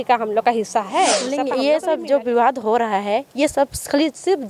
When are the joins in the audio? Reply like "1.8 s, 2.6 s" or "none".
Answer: 1.3 s